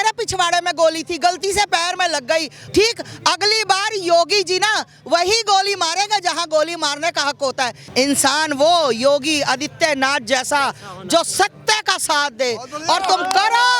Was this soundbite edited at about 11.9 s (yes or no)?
no